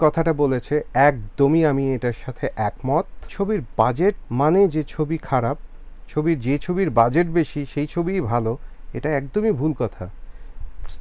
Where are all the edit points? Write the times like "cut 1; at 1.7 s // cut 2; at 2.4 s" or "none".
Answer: cut 1; at 3.2 s // cut 2; at 4.2 s